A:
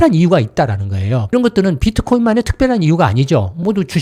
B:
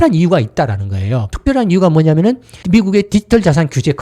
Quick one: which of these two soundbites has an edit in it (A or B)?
B